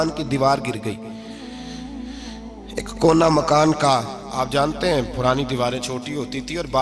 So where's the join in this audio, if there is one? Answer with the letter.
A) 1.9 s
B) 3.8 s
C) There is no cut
C